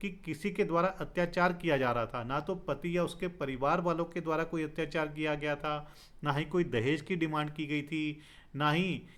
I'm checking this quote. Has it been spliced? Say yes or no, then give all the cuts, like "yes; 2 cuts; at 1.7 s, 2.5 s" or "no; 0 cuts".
no; 0 cuts